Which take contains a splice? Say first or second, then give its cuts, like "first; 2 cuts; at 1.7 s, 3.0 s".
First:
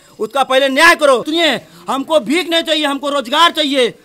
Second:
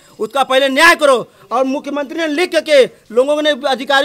first; 1 cut; at 1.3 s